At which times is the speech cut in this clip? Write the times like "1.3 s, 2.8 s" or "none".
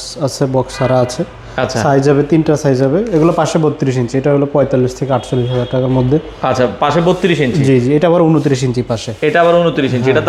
none

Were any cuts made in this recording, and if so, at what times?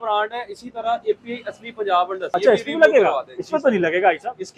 2.2 s

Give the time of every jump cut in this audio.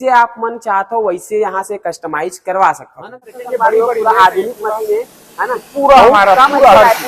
3.4 s

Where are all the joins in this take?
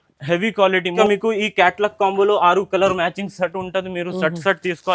1.0 s

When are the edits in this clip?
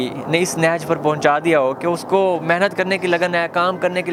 none

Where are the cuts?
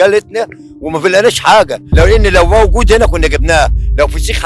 1.8 s

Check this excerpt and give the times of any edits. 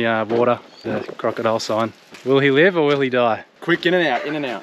3.5 s

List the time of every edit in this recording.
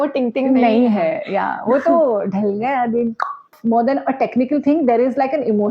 3.5 s

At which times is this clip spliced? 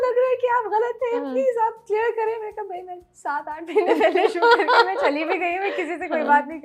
none

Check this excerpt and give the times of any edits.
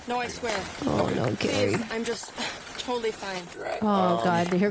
3.6 s

